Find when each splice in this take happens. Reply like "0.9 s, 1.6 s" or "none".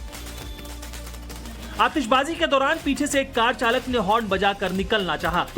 2.1 s